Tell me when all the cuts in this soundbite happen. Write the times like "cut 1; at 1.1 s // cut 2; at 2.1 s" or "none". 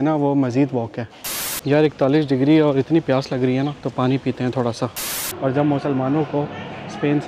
cut 1; at 1.5 s // cut 2; at 3.8 s // cut 3; at 5.3 s